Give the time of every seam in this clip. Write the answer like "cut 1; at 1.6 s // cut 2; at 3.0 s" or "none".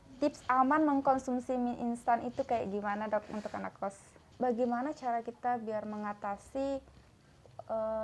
cut 1; at 4.2 s